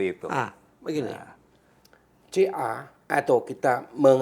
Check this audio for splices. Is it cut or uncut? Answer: uncut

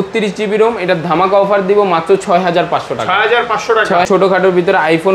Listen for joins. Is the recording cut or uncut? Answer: cut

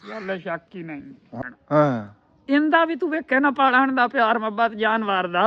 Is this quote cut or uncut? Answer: cut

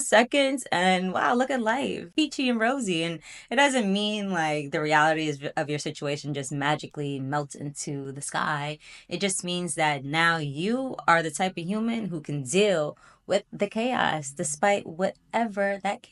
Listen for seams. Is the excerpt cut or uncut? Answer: uncut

